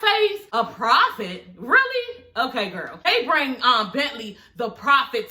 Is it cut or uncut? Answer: cut